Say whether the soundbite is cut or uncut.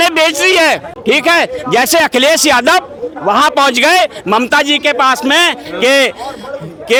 uncut